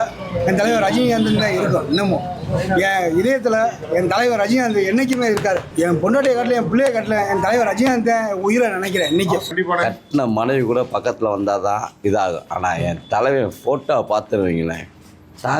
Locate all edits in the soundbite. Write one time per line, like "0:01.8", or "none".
0:05.7
0:09.5